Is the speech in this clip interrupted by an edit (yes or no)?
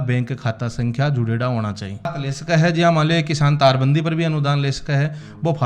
yes